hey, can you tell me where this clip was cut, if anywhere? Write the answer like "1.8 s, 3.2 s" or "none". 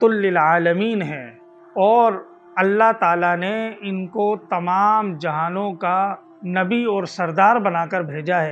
none

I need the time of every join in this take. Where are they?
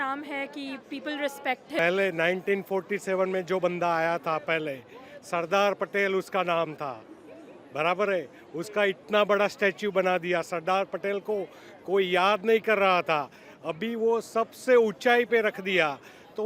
1.8 s

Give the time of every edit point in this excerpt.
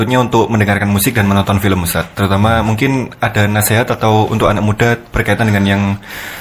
none

